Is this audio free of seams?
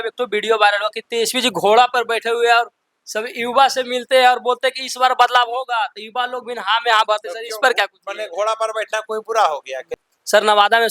no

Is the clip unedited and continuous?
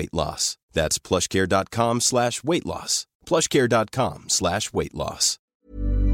yes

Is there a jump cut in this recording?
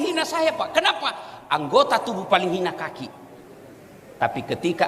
no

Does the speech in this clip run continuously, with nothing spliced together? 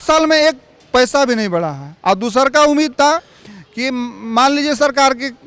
yes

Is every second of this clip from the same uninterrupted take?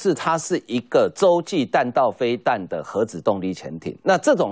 yes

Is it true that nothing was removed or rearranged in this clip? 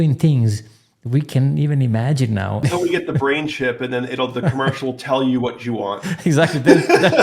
no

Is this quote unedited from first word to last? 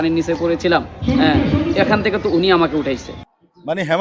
no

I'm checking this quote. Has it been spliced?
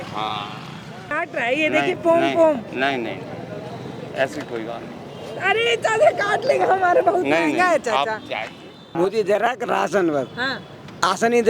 yes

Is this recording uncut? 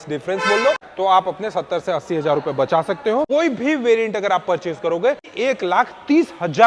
no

